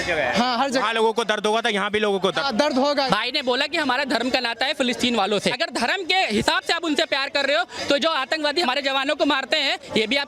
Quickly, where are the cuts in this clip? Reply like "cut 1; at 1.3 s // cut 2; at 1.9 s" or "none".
cut 1; at 3.1 s // cut 2; at 5.6 s // cut 3; at 8.7 s